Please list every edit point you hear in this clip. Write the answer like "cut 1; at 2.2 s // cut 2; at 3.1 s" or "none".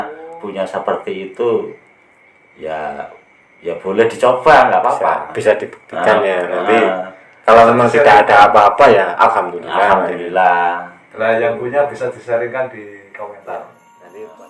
none